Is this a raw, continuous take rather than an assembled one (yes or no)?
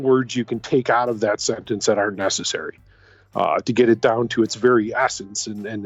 yes